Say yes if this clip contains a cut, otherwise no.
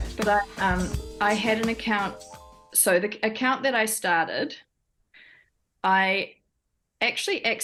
no